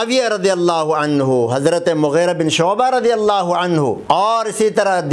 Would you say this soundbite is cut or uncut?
cut